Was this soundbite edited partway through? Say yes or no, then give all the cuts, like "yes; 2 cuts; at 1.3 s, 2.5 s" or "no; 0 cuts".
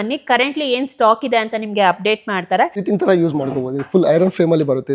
yes; 1 cut; at 2.8 s